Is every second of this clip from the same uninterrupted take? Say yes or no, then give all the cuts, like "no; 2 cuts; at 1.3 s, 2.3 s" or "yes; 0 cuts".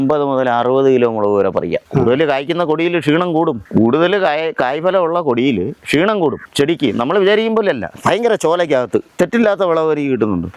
no; 5 cuts; at 1.8 s, 3.6 s, 6.4 s, 7.9 s, 9.1 s